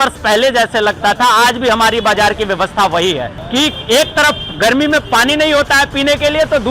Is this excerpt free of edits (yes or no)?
no